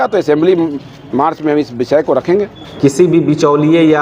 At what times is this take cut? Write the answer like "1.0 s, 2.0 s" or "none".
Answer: 2.6 s